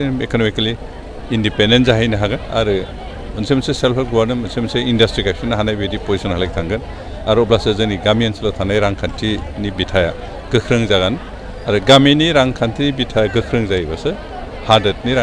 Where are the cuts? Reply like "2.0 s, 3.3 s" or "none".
none